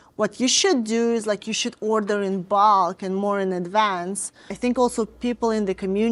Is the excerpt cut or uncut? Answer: cut